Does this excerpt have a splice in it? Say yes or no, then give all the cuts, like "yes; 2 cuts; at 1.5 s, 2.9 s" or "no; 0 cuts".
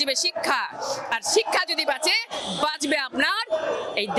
no; 0 cuts